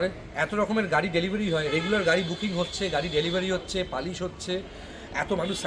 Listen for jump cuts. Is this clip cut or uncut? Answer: uncut